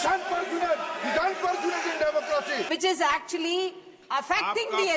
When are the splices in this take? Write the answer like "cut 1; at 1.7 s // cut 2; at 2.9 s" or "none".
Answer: cut 1; at 2.7 s

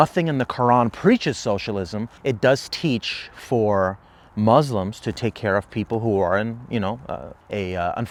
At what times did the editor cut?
none

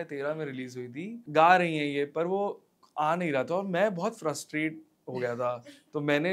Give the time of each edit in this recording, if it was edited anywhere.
cut 1; at 1.2 s

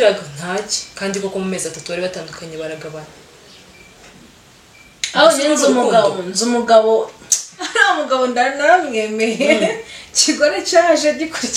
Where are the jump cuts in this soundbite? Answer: none

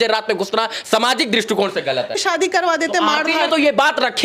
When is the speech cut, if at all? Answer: cut 1; at 2.2 s

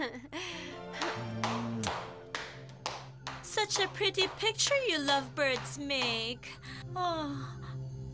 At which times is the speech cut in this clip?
cut 1; at 3.9 s

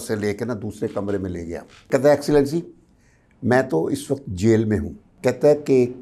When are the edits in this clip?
cut 1; at 1.9 s // cut 2; at 5.1 s

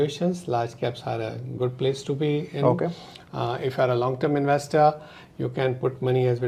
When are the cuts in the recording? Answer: none

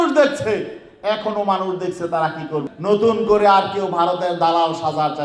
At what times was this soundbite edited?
cut 1; at 2.7 s

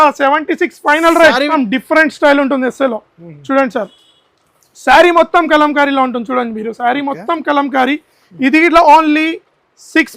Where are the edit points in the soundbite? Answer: cut 1; at 1.5 s

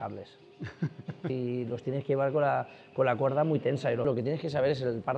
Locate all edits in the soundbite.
cut 1; at 1.3 s // cut 2; at 4.0 s

